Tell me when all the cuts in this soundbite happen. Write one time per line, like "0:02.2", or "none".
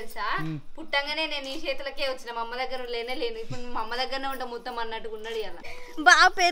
0:05.6